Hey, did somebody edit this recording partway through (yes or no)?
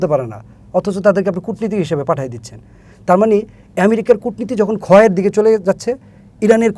no